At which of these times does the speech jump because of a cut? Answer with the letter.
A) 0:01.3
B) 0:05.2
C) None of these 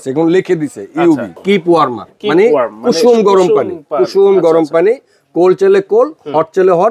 A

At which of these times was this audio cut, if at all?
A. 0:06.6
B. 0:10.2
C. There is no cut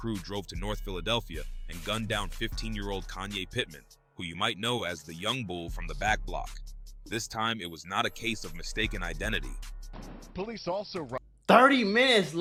C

